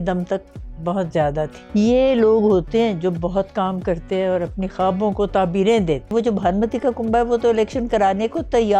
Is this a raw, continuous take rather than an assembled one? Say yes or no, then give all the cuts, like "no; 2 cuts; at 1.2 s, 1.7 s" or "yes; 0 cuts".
no; 2 cuts; at 1.6 s, 6.1 s